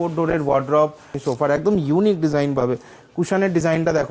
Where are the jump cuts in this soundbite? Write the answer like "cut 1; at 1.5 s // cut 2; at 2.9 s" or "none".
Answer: cut 1; at 1.1 s